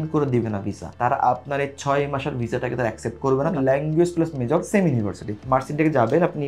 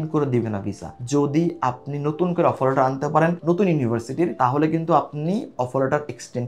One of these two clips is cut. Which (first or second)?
first